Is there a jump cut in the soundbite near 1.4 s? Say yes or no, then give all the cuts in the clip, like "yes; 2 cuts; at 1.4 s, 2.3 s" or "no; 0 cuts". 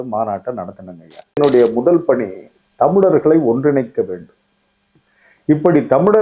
yes; 1 cut; at 1.4 s